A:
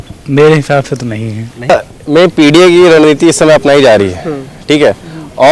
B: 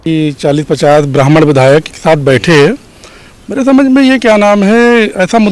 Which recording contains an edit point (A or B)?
A